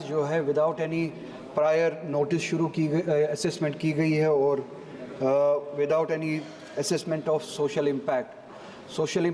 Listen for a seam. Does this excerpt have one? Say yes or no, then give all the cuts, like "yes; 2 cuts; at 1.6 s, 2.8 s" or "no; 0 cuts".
no; 0 cuts